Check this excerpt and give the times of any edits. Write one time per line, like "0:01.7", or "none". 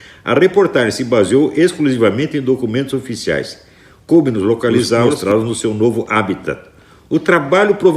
0:05.1